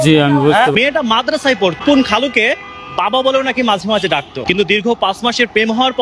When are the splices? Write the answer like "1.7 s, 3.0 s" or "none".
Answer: 0.7 s, 1.8 s, 4.3 s